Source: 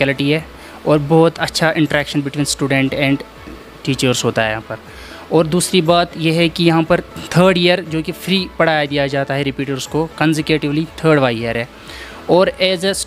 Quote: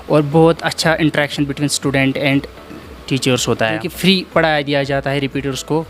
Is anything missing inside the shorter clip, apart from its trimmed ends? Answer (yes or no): yes